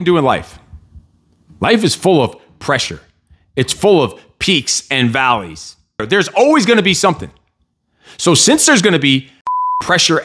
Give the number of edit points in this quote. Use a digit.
1